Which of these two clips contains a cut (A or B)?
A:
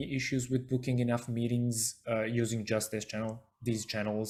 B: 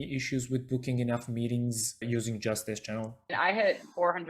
B